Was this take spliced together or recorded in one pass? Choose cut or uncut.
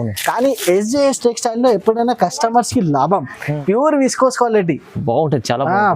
cut